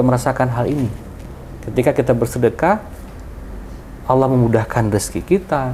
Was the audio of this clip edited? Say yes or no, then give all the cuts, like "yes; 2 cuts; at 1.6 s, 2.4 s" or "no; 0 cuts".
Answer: no; 0 cuts